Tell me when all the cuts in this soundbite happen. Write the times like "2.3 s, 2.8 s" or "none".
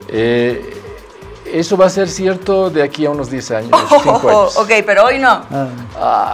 none